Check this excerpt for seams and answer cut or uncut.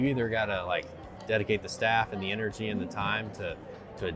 uncut